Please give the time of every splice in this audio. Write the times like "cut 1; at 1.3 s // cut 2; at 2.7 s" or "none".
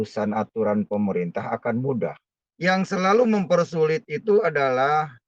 none